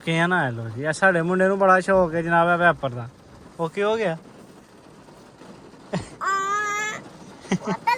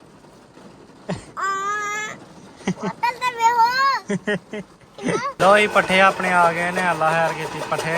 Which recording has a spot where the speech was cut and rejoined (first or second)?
second